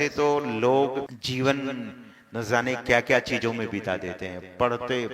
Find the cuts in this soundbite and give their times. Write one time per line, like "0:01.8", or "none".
0:01.2